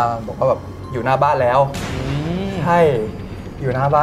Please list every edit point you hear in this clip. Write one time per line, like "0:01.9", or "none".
none